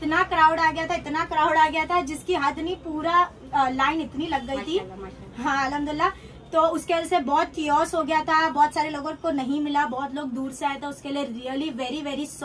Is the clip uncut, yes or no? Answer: yes